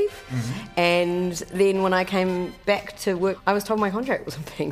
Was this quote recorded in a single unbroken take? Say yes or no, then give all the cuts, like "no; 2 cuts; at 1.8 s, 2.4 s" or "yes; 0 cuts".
no; 1 cut; at 3.4 s